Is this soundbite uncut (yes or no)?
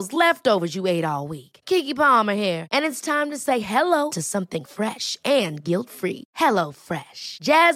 yes